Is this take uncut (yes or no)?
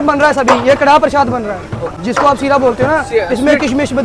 yes